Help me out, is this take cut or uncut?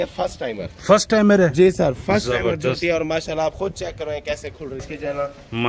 cut